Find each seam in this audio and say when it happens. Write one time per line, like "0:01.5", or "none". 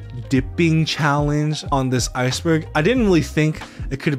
none

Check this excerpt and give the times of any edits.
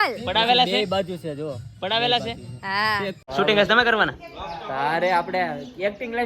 0:03.2

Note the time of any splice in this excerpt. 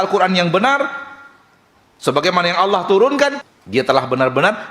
0:03.4

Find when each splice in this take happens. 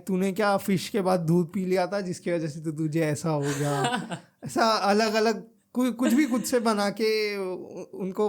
none

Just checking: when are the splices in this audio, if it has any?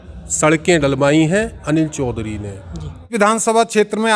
0:03.1

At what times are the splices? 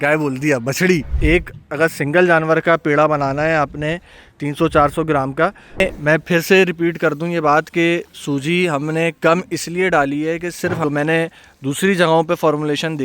0:01.1
0:05.8
0:10.8

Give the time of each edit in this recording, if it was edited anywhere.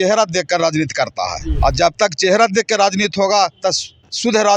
0:01.4

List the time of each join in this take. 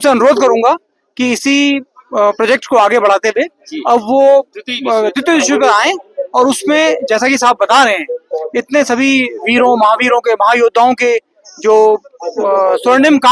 none

